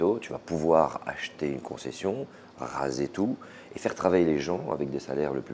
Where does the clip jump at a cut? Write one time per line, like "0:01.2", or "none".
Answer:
none